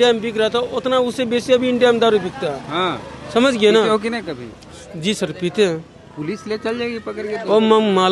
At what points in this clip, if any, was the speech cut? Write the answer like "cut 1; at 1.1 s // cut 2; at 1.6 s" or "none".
none